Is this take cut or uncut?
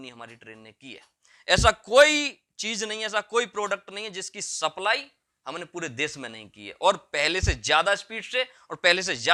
uncut